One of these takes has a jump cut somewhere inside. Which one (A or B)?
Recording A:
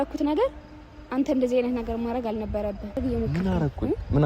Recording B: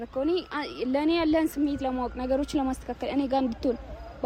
A